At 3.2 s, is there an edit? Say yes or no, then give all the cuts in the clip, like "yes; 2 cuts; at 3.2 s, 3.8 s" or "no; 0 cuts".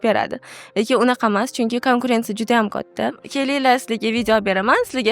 yes; 1 cut; at 3.2 s